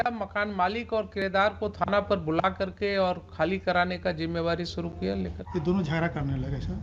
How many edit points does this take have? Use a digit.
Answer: 1